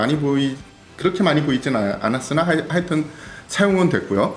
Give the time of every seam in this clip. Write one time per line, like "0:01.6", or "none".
none